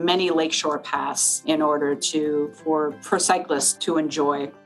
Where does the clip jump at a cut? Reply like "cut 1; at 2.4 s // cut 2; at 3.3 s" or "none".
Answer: cut 1; at 1.4 s // cut 2; at 3.0 s // cut 3; at 3.7 s